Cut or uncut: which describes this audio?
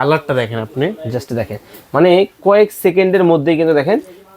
uncut